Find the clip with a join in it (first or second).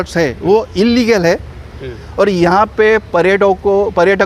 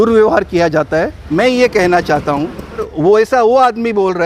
second